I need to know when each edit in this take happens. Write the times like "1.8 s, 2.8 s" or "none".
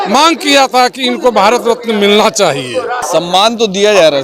3.0 s